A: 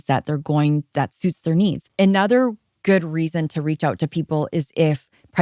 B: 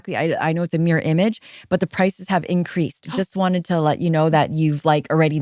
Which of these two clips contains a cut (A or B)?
A